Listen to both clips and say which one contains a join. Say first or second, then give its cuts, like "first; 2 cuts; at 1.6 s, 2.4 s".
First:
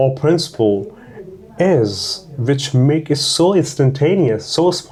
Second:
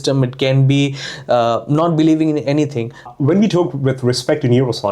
second; 1 cut; at 3.1 s